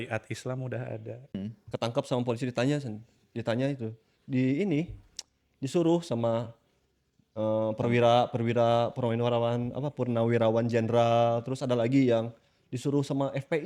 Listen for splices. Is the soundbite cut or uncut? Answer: cut